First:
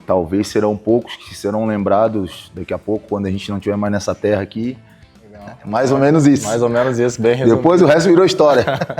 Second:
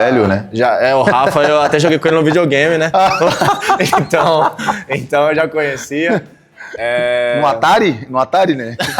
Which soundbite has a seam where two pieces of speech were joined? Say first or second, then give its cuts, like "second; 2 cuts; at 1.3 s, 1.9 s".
first; 1 cut; at 5.3 s